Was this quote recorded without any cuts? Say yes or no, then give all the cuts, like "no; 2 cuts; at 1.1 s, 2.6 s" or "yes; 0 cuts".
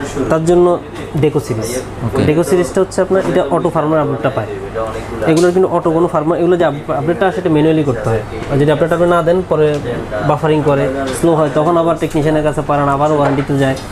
yes; 0 cuts